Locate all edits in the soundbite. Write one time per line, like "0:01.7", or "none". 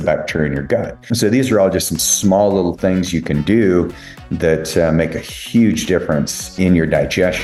0:01.0
0:06.5

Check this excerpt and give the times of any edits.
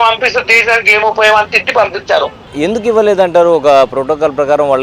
0:02.5

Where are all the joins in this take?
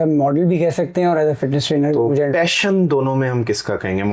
none

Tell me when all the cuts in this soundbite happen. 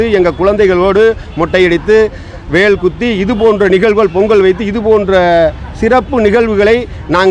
none

